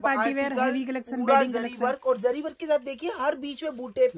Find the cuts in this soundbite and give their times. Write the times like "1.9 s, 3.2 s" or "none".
none